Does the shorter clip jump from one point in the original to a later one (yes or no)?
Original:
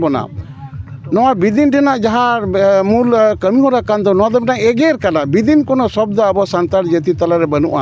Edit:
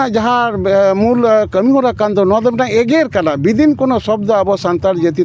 no